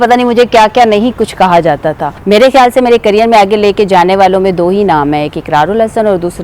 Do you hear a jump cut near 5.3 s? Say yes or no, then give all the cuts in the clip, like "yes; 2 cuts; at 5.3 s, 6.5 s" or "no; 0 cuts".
no; 1 cut; at 2.1 s